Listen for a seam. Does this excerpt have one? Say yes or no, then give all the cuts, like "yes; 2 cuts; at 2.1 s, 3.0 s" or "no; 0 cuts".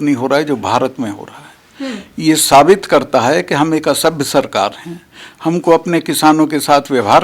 no; 0 cuts